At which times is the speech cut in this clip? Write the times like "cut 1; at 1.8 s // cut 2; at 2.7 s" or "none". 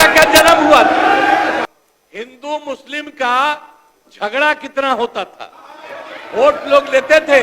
cut 1; at 1.6 s

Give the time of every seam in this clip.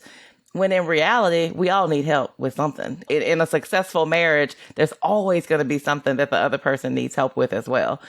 cut 1; at 3.1 s

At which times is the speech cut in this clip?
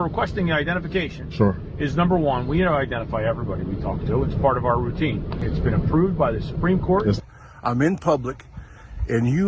cut 1; at 5.4 s // cut 2; at 7.2 s

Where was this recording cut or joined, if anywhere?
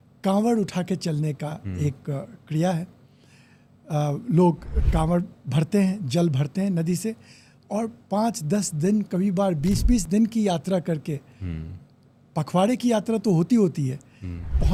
none

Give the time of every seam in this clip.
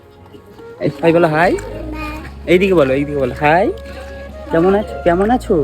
cut 1; at 1.0 s

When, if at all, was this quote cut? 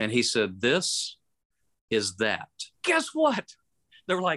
cut 1; at 2.7 s

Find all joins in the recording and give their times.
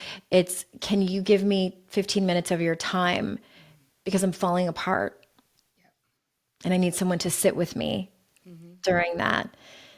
none

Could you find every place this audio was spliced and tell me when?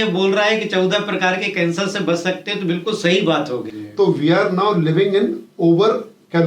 cut 1; at 3.8 s

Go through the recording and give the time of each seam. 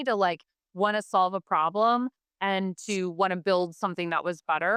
none

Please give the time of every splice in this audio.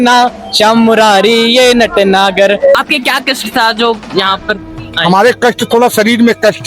cut 1; at 2.8 s

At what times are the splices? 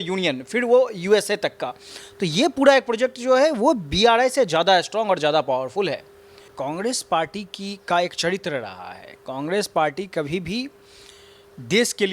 cut 1; at 6.5 s

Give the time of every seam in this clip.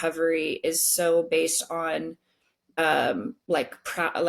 cut 1; at 2.8 s // cut 2; at 3.4 s

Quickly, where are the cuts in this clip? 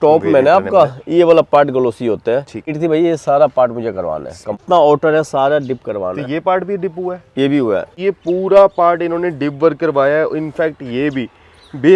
cut 1; at 2.7 s // cut 2; at 4.5 s // cut 3; at 7.9 s

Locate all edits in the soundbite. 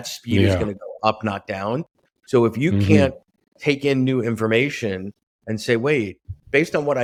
none

